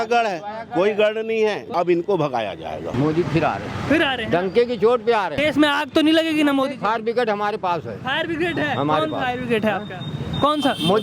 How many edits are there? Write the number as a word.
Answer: three